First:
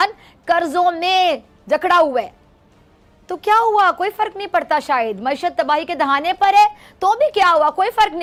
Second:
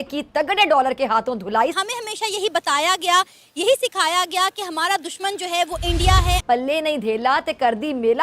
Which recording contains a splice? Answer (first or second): second